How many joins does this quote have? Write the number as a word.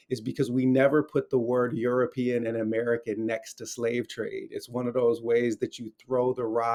zero